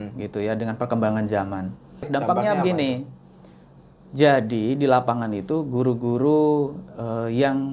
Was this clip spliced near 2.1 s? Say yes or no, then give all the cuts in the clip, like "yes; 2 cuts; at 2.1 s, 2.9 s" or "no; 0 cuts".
yes; 1 cut; at 2.1 s